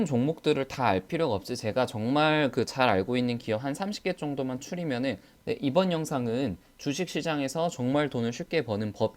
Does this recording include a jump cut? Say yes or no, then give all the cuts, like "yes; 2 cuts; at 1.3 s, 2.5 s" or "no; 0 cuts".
yes; 1 cut; at 5.3 s